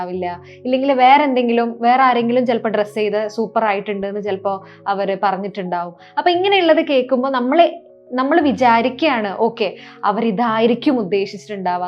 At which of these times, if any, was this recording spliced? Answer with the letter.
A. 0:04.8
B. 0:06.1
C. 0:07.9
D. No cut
D